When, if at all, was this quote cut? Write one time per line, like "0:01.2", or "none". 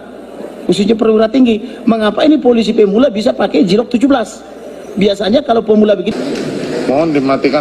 0:06.1